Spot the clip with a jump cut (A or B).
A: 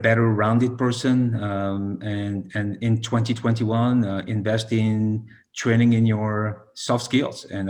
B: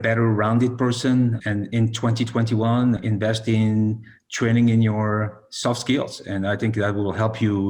B